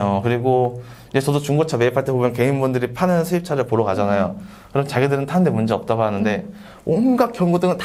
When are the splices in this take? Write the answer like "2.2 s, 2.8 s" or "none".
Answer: none